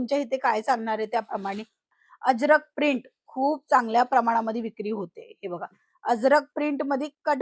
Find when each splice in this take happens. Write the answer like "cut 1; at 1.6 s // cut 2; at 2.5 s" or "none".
cut 1; at 1.8 s